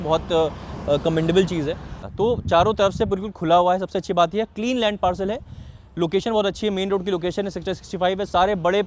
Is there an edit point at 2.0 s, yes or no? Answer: yes